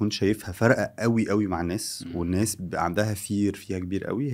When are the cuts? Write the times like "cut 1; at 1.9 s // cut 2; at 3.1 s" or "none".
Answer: none